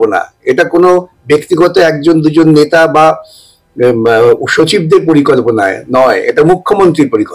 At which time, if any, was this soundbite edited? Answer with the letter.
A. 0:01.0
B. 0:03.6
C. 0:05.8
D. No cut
D